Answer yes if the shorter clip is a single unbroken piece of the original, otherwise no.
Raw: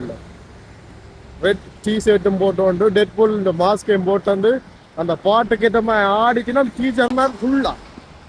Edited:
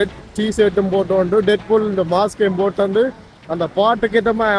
yes